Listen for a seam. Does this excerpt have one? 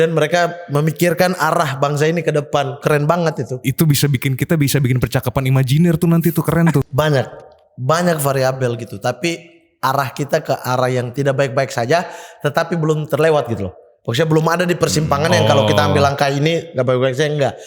yes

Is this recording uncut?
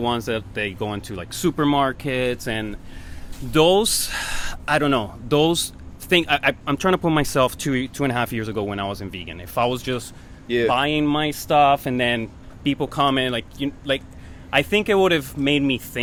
yes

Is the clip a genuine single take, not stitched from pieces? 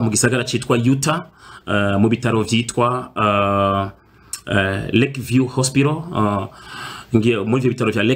yes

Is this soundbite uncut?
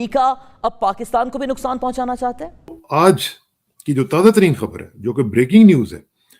no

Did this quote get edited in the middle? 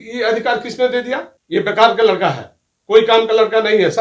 yes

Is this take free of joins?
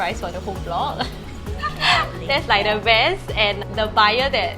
yes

